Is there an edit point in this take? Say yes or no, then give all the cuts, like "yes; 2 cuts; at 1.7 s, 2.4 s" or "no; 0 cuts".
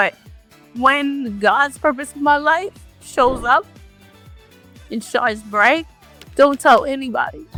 no; 0 cuts